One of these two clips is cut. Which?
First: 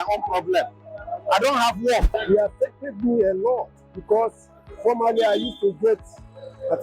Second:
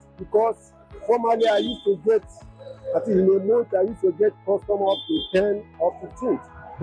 first; 1 cut; at 2.1 s

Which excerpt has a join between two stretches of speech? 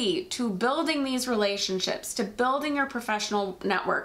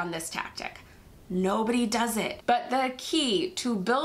second; 1 cut; at 2.3 s

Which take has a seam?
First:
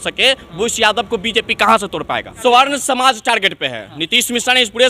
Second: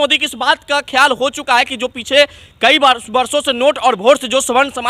first; 1 cut; at 2.3 s

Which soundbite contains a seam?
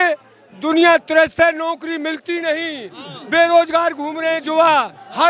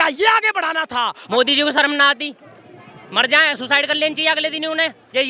second; 1 cut; at 1.2 s

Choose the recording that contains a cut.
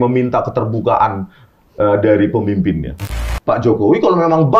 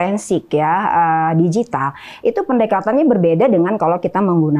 first; 1 cut; at 3.1 s

